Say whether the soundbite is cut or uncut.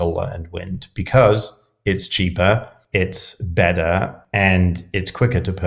cut